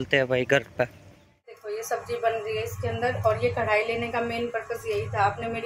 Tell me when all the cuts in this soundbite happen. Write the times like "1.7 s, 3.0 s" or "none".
1.6 s